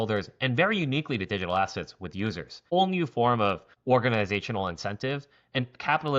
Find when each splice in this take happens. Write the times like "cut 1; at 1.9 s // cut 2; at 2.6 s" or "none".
cut 1; at 2.7 s // cut 2; at 3.7 s